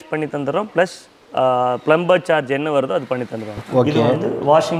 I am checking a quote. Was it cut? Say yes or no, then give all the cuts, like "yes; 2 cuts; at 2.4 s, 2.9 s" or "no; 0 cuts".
yes; 1 cut; at 3.7 s